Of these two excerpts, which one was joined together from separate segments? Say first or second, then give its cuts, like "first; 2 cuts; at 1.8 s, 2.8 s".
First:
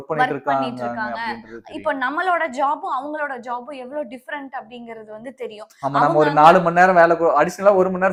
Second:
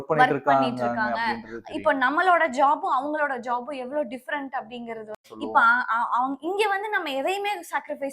second; 1 cut; at 5.3 s